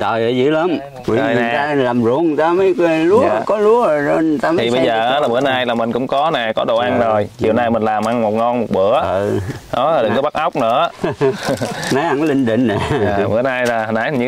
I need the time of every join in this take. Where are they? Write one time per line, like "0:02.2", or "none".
0:00.9